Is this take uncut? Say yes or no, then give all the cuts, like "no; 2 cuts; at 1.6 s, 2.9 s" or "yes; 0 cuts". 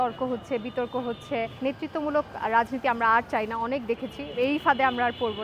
no; 1 cut; at 1.5 s